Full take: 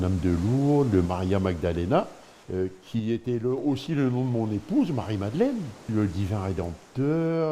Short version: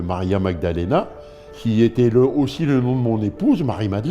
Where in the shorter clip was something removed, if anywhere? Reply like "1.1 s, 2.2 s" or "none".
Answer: 1.5 s